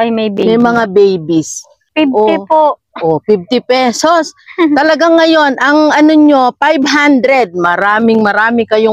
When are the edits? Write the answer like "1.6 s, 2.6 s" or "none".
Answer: 1.8 s